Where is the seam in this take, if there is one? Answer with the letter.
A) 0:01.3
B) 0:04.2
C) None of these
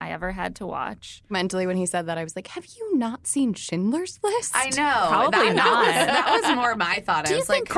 A